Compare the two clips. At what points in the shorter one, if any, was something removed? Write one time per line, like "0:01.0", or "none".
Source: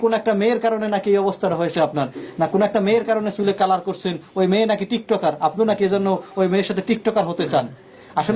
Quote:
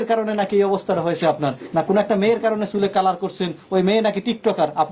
0:01.6